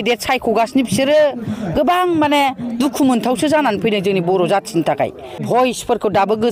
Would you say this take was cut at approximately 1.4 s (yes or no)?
no